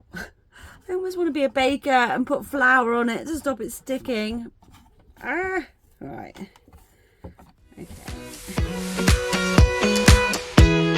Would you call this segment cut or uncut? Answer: cut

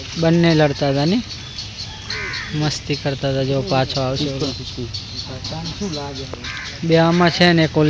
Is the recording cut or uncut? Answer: uncut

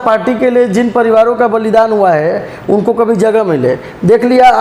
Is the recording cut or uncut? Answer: uncut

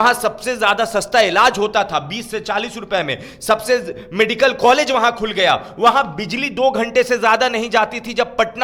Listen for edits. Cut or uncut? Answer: uncut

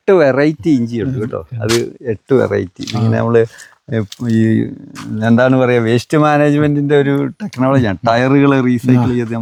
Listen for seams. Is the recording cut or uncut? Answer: uncut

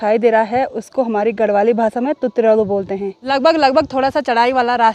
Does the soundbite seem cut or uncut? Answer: uncut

